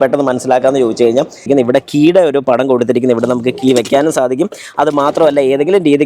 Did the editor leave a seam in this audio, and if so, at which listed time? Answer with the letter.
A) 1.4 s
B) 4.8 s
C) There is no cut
A